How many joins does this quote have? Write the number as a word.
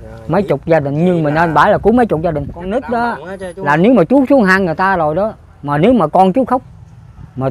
one